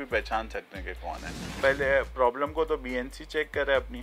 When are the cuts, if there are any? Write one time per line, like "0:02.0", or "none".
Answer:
0:01.6